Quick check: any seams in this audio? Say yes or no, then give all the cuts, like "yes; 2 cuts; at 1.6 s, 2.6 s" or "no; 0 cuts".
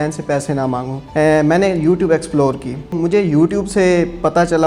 yes; 2 cuts; at 1.0 s, 2.9 s